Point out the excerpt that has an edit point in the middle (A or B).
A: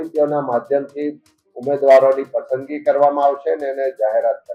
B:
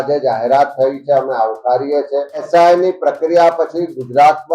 B